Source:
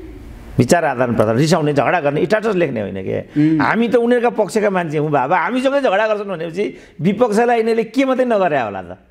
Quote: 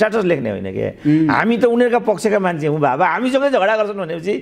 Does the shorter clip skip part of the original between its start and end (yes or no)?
no